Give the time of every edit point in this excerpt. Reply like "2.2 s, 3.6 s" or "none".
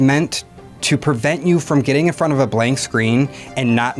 none